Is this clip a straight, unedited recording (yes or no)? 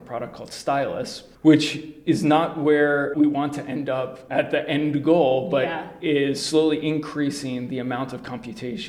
yes